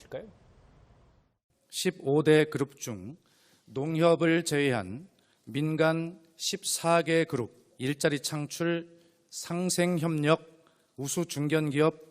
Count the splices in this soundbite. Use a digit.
1